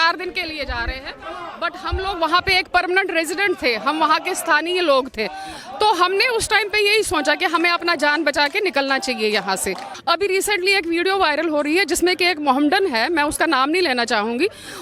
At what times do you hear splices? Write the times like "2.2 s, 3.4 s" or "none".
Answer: 9.9 s